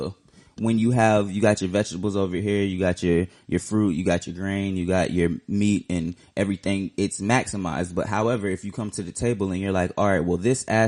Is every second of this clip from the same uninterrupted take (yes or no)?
yes